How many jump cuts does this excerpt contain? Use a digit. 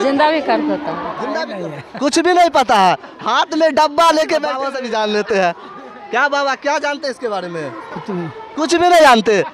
2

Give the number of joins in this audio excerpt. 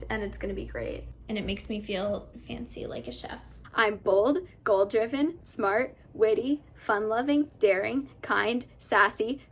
2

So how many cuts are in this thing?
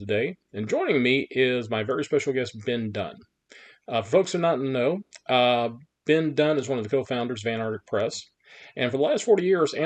0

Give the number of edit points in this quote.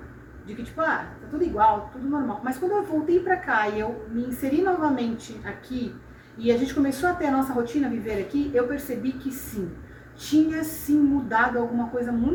0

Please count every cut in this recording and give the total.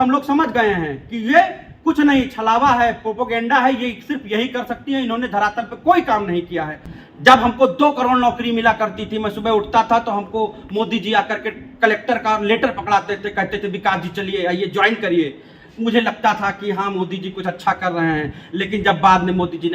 1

